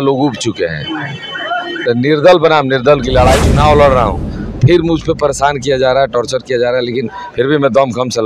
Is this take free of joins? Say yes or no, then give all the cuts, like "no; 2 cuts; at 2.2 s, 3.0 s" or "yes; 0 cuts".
no; 1 cut; at 3.4 s